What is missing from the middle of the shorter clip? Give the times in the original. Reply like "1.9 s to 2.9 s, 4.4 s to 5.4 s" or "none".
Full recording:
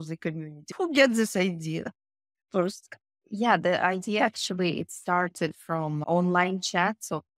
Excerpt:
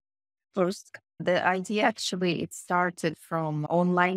3.2 s to 3.6 s